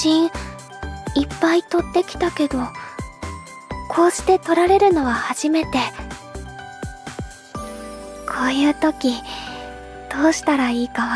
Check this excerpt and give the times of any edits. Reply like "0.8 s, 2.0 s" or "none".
5.9 s, 8.3 s

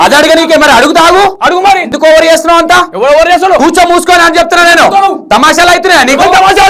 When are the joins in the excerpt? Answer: none

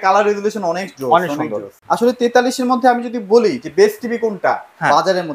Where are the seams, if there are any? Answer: 1.7 s

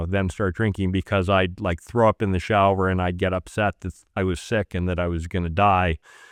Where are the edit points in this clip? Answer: none

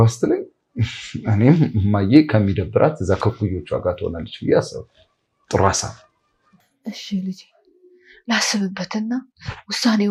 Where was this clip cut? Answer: none

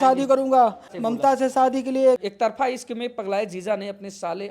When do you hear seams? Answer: 0.9 s, 2.2 s

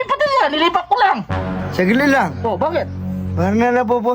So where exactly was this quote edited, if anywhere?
1.3 s

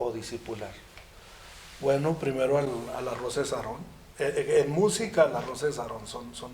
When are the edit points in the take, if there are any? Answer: none

